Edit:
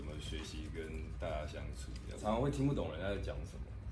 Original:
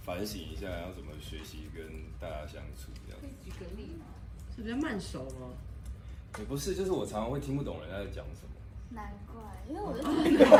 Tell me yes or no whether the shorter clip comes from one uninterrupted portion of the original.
no